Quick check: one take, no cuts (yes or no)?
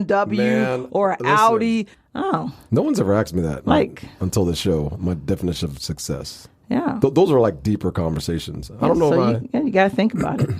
no